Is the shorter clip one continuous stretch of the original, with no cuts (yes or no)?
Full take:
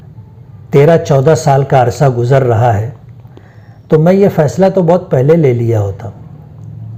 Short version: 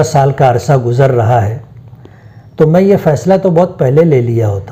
yes